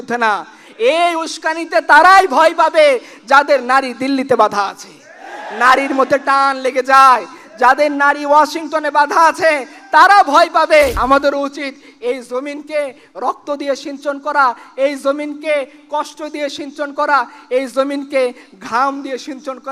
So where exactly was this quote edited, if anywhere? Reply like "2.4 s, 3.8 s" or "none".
11.0 s